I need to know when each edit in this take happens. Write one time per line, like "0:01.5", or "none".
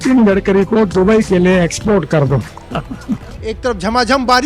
0:03.4